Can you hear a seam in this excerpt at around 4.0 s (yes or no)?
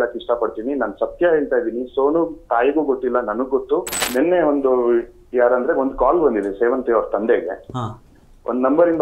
yes